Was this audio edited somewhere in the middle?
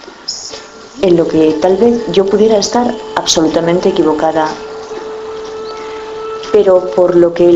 no; 0 cuts

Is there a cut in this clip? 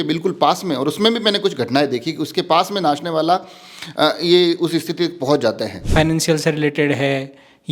yes; 1 cut; at 5.7 s

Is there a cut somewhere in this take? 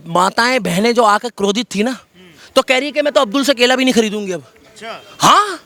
no; 0 cuts

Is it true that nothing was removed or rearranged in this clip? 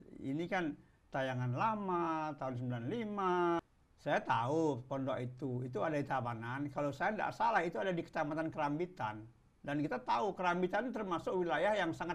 no; 1 cut; at 3.6 s

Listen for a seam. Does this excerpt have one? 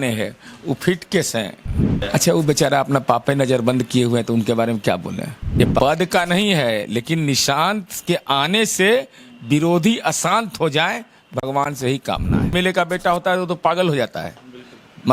yes; 3 cuts; at 2.0 s, 5.8 s, 12.5 s

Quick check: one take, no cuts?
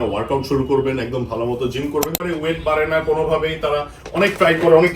no; 1 cut; at 2.2 s

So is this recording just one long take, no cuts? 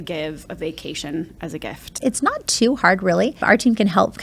no; 2 cuts; at 1.8 s, 3.4 s

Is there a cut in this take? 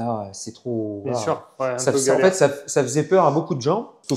no; 0 cuts

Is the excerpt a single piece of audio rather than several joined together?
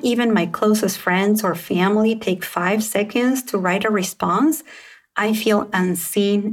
yes; 0 cuts

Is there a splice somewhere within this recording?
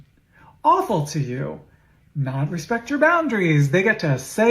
no; 0 cuts

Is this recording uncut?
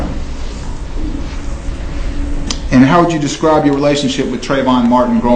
yes; 0 cuts

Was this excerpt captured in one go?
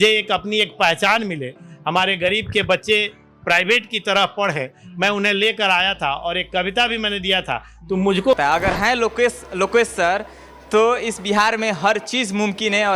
no; 1 cut; at 8.4 s

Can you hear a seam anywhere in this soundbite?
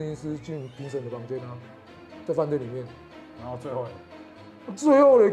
no; 0 cuts

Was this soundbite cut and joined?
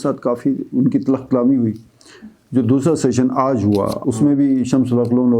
yes; 1 cut; at 3.9 s

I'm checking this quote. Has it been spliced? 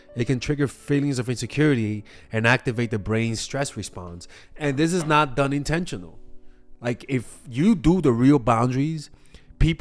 no; 0 cuts

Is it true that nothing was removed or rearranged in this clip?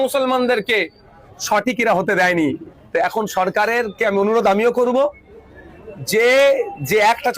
no; 1 cut; at 2.7 s

